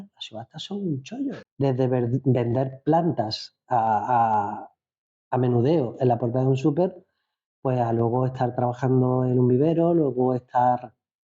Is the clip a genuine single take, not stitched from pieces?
no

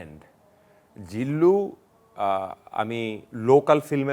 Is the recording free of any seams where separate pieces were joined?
yes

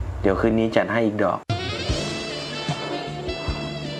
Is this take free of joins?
yes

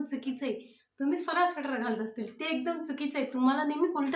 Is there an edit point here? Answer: no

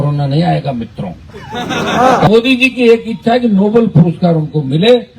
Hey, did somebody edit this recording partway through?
yes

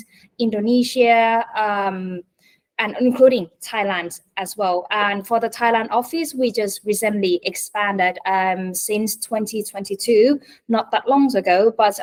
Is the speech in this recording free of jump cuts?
yes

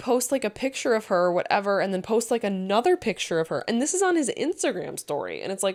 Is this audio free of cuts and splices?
yes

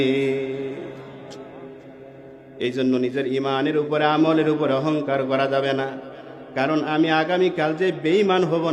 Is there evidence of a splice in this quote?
no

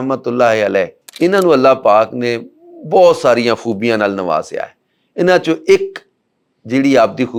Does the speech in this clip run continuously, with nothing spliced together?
yes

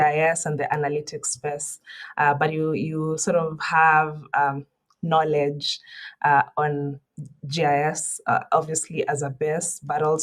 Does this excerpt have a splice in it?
no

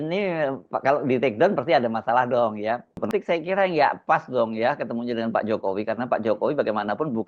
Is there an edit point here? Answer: yes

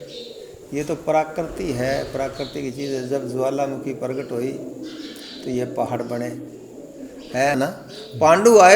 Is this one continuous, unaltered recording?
no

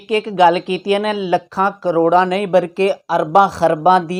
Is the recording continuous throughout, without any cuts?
yes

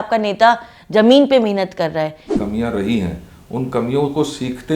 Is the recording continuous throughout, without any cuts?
no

